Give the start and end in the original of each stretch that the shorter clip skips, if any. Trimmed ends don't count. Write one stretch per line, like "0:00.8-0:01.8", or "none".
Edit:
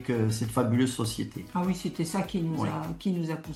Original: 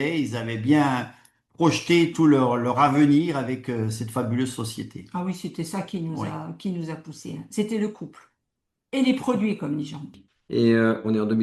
none